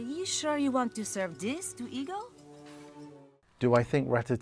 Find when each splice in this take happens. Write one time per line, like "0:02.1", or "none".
0:03.3